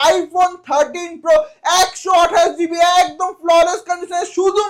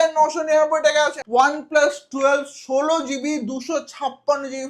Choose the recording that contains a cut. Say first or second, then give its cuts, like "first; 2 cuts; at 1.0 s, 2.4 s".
second; 1 cut; at 1.2 s